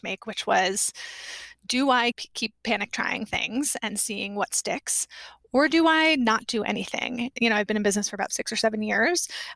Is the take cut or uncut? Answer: cut